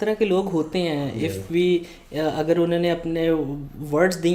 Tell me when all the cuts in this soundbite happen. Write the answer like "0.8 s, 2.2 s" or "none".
none